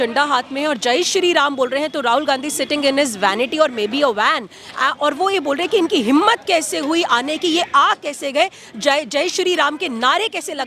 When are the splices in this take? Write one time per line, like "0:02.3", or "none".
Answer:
none